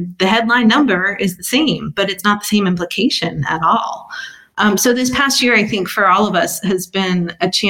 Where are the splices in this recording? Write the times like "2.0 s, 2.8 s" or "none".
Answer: none